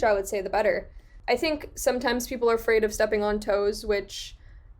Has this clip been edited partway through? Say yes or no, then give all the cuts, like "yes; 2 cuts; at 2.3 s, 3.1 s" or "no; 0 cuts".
yes; 1 cut; at 1.1 s